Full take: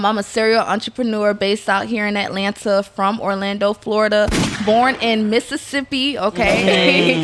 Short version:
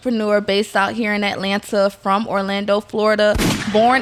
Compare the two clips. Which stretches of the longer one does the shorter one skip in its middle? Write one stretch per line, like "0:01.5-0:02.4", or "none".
none